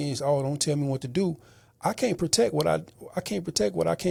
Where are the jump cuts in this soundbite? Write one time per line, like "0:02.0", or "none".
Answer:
none